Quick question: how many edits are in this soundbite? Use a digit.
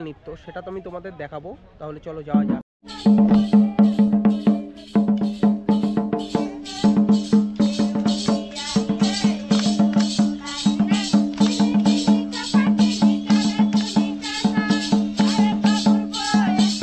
0